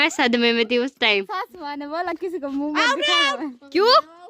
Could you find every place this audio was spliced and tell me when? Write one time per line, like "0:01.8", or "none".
0:01.3